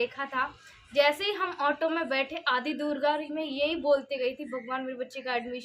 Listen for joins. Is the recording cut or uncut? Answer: uncut